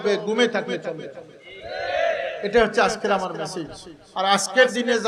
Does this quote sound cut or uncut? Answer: cut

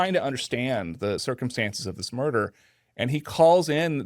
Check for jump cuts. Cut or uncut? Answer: cut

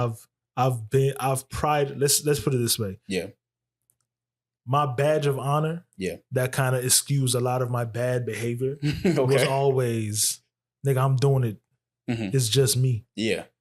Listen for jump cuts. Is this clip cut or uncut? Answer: uncut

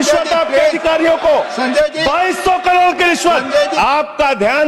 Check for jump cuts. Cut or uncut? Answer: cut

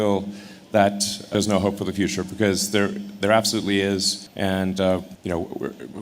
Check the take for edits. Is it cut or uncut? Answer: cut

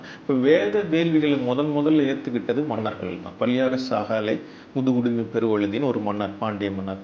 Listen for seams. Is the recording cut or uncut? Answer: cut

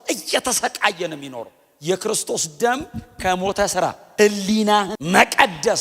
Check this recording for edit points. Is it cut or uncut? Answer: cut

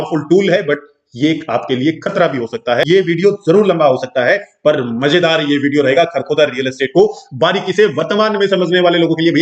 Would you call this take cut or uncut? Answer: cut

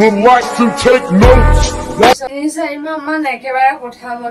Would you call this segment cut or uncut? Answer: cut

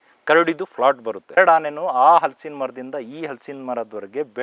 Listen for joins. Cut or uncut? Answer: cut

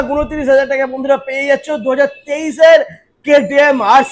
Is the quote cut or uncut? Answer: uncut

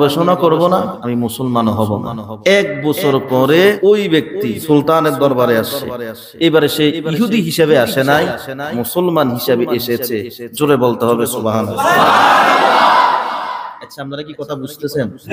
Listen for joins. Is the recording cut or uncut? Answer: cut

